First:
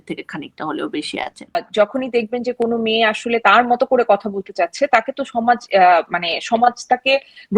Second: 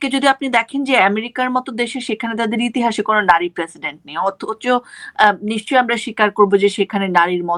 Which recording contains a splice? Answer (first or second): first